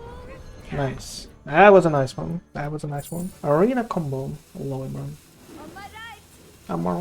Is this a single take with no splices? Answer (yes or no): no